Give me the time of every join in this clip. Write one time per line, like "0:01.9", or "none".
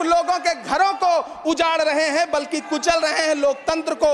none